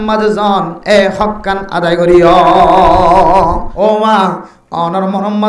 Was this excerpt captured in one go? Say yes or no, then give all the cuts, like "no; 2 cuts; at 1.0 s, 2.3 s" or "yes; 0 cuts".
no; 1 cut; at 3.7 s